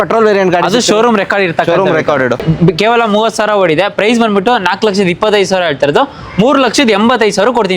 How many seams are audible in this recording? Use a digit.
1